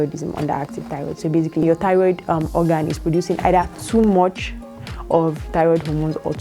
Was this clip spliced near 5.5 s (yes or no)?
no